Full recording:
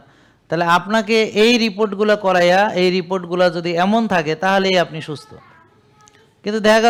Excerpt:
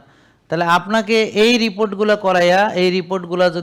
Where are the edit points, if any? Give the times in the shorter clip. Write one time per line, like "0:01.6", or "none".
none